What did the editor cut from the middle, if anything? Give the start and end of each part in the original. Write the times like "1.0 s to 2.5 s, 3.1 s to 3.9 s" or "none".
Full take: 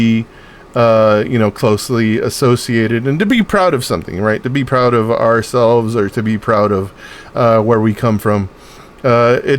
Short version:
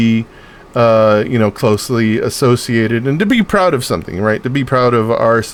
none

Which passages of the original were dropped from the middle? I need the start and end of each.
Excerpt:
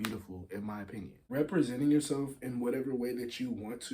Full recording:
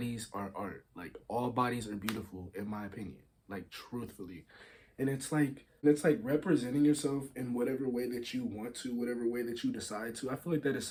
3.3 s to 6.2 s

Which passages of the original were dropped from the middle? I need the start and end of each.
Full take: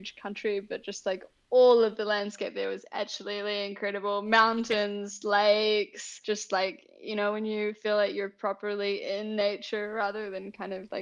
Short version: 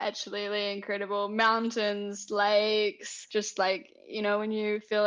none

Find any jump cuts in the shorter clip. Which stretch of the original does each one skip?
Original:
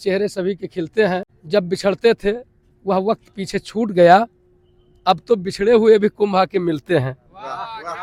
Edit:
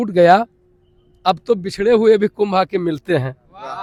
none

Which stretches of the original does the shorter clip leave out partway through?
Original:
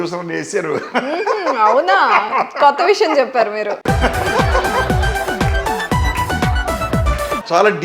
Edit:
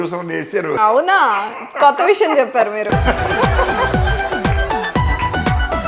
0.8 s to 1.6 s, 3.6 s to 3.8 s

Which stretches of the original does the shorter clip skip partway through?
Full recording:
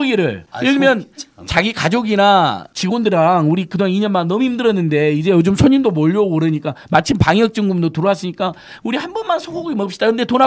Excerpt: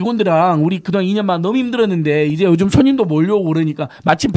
none

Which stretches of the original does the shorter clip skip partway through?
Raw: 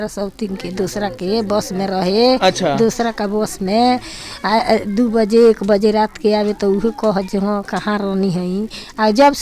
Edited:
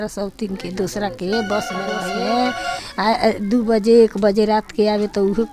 2.0 s to 3.4 s

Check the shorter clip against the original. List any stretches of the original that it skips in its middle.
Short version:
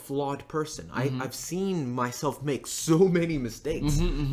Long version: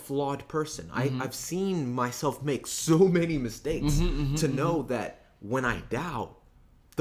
none

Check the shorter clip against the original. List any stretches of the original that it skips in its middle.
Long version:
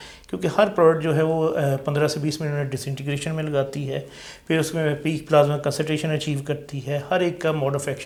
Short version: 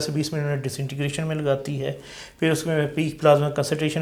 none

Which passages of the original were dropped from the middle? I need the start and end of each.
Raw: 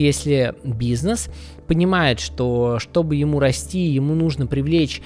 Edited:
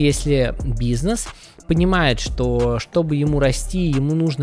none

